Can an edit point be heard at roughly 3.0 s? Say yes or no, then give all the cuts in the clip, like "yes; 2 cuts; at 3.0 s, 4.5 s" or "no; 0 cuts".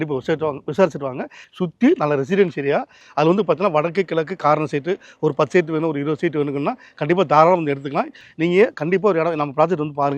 yes; 3 cuts; at 1.4 s, 3.0 s, 8.2 s